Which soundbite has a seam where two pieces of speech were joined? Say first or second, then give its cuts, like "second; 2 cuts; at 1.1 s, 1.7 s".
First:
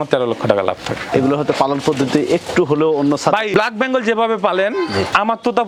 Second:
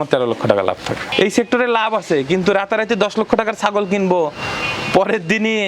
second; 1 cut; at 1.1 s